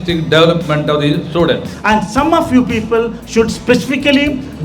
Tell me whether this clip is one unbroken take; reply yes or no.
no